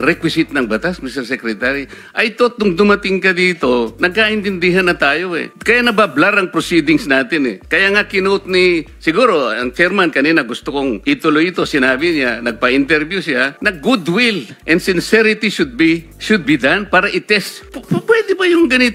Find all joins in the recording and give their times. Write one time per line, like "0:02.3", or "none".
none